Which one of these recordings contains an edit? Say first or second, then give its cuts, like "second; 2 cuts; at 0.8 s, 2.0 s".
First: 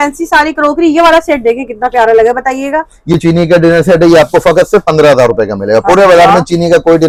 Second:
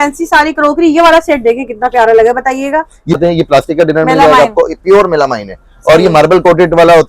second; 1 cut; at 3.2 s